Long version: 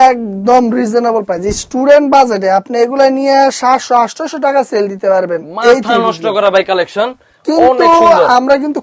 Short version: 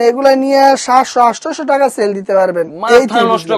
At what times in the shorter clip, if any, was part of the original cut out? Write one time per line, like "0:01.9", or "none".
none